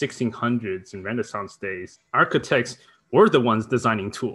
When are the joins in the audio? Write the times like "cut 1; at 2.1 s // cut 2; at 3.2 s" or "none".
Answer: cut 1; at 1.9 s